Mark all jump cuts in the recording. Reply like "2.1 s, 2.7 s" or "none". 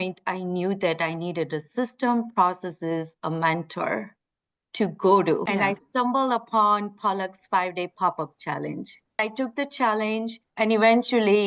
5.4 s, 9.2 s, 10.4 s